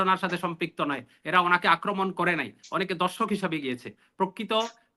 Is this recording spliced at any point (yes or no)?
no